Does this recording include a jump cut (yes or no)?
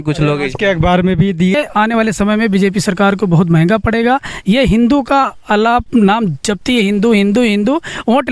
yes